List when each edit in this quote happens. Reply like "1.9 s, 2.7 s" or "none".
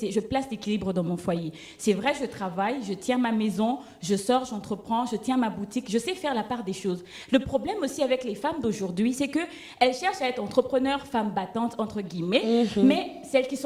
none